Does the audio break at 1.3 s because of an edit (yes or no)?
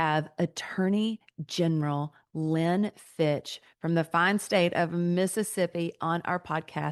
no